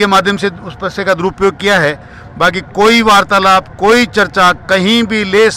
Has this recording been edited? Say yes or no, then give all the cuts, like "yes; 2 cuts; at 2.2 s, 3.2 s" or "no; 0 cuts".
no; 0 cuts